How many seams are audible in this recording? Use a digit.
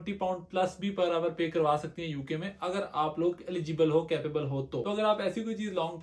1